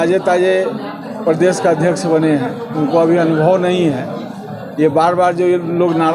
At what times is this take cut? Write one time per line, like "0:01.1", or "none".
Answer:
none